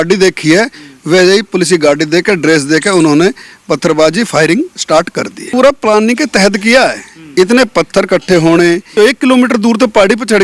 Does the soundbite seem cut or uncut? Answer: cut